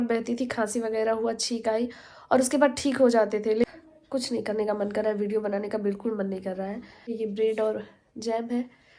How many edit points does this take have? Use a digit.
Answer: 2